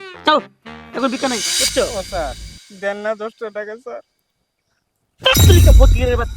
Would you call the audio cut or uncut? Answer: cut